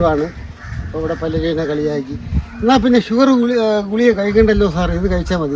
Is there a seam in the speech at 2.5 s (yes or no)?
no